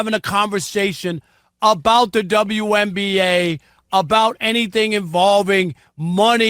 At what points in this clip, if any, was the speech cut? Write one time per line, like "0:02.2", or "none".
none